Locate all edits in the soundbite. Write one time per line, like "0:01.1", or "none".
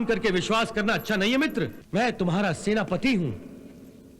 0:01.8

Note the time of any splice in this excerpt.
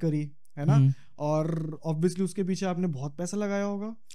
none

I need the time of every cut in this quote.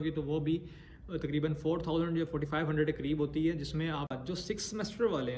0:04.2

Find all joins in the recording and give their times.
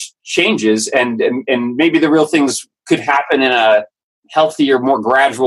none

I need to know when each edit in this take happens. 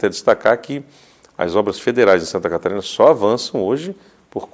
none

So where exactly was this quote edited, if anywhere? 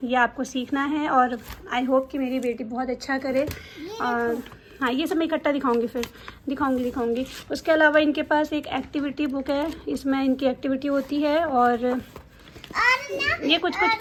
none

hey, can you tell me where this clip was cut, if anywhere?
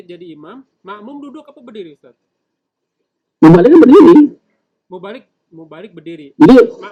none

